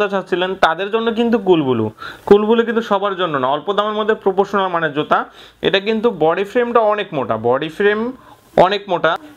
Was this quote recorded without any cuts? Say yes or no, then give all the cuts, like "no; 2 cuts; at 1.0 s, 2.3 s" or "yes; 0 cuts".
yes; 0 cuts